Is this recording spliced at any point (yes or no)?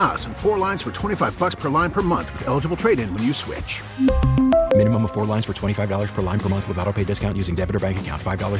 no